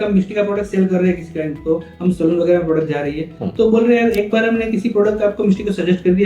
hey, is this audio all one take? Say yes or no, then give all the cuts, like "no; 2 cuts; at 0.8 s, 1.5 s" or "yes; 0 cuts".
yes; 0 cuts